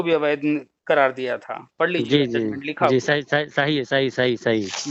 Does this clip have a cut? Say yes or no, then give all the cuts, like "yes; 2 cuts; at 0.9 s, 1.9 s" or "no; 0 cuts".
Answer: no; 0 cuts